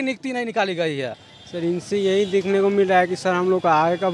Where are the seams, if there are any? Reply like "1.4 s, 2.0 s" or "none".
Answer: 1.2 s